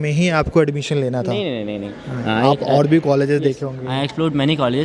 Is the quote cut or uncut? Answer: uncut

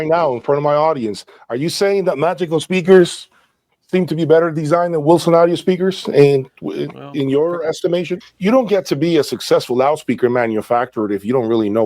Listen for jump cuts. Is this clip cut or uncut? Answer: cut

